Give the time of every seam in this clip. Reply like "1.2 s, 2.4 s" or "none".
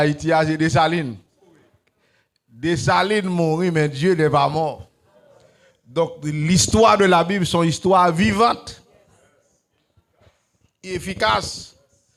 none